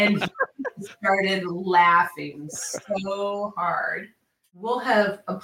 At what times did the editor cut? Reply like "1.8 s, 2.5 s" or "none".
4.1 s